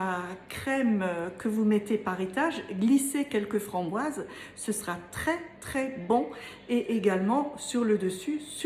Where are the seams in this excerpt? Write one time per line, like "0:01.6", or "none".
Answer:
none

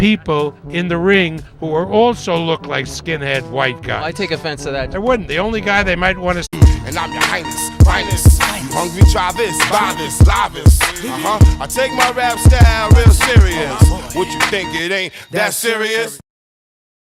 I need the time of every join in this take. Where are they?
none

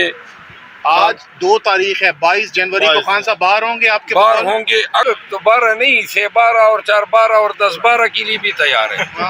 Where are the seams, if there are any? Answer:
0:05.0

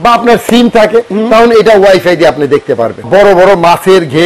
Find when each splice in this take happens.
0:03.1

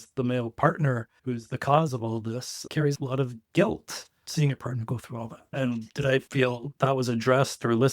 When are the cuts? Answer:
0:01.1

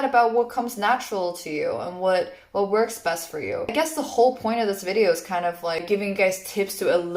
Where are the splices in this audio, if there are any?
0:03.7
0:05.8

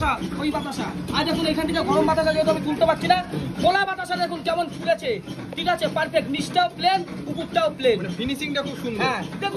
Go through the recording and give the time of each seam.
none

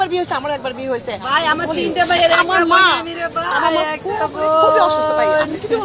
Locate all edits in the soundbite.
0:01.2

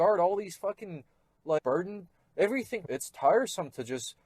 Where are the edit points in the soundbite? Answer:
0:01.6
0:02.8

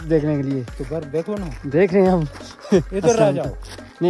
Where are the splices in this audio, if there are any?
none

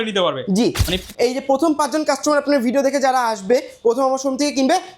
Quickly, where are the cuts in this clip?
0:01.0

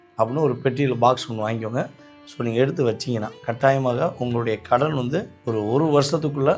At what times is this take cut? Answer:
0:03.4
0:05.3

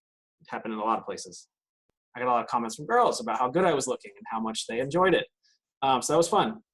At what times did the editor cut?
0:01.8

